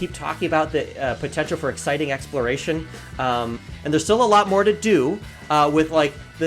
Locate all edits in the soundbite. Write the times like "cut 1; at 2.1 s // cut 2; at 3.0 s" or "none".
cut 1; at 3.6 s